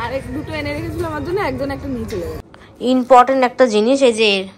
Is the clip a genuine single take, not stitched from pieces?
no; 1 cut; at 2.4 s

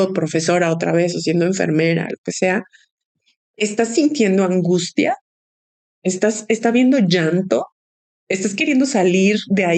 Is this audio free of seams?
yes; 0 cuts

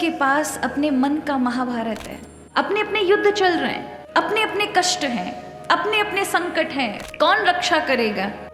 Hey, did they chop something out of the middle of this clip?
yes; 2 cuts; at 2.4 s, 7.0 s

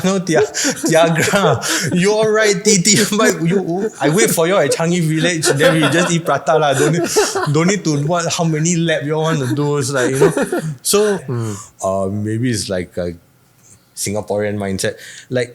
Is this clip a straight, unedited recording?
no; 1 cut; at 11.3 s

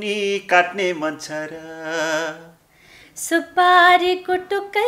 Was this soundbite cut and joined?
no; 0 cuts

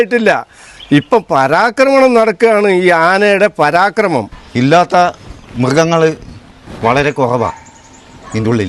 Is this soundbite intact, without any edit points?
no; 1 cut; at 4.4 s

